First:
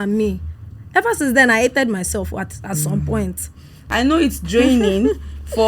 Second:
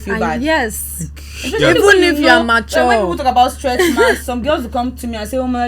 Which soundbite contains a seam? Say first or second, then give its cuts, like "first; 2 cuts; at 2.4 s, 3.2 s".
first; 1 cut; at 3.9 s